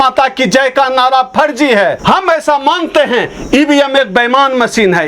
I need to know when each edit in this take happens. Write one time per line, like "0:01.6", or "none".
0:02.0